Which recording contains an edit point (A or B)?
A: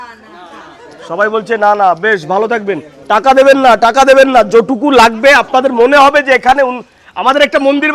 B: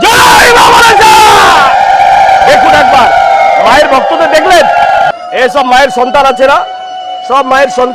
B